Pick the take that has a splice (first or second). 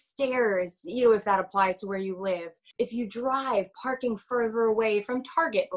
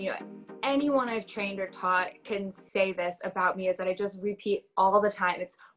first